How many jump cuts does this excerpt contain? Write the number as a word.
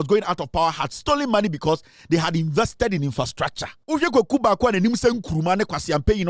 one